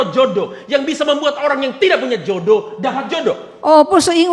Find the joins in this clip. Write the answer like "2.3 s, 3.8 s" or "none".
none